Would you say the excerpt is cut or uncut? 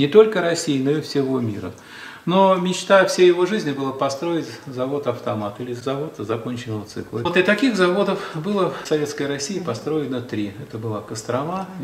cut